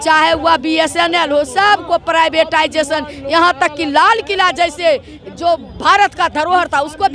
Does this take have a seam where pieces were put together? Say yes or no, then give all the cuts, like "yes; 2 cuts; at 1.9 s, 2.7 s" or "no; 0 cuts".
no; 0 cuts